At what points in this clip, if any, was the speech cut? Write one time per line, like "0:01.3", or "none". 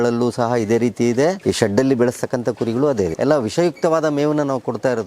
0:01.4
0:03.1